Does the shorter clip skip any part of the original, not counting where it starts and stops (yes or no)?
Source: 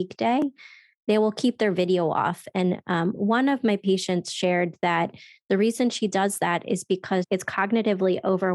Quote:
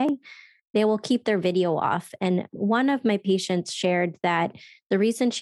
yes